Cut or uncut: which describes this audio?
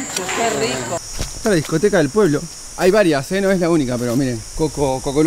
cut